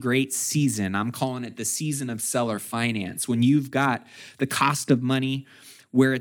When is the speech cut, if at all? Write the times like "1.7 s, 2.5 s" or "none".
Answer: none